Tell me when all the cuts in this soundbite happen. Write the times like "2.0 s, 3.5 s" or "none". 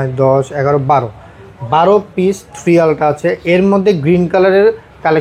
none